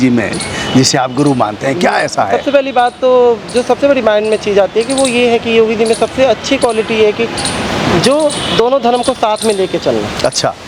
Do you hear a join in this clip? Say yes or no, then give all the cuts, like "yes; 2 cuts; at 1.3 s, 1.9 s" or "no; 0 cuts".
no; 0 cuts